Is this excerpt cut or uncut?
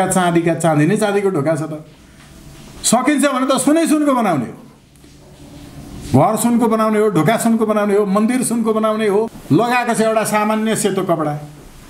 cut